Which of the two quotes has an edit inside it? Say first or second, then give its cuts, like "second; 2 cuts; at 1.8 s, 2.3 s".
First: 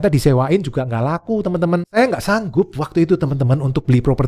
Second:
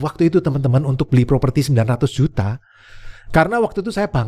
first; 1 cut; at 1.9 s